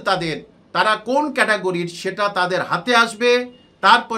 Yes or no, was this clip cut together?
no